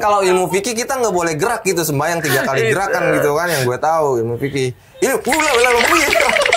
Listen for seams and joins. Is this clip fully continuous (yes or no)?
yes